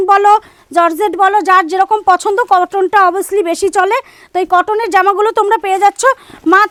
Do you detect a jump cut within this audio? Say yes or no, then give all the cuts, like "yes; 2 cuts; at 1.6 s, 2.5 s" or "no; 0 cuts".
no; 0 cuts